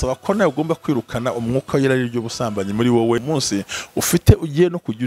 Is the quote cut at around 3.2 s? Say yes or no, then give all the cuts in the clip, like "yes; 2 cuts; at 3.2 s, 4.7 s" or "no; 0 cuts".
yes; 1 cut; at 3.2 s